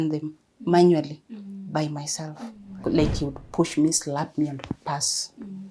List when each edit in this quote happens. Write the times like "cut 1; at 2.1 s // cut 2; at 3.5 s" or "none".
cut 1; at 2.7 s